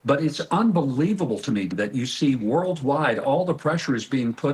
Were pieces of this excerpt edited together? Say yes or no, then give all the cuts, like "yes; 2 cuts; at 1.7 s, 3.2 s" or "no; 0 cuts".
yes; 1 cut; at 1.7 s